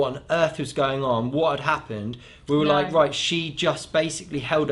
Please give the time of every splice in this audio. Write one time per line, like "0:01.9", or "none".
none